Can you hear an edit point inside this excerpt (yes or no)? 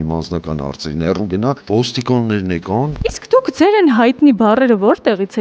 yes